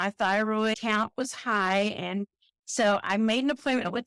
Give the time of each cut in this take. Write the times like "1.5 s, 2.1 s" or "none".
none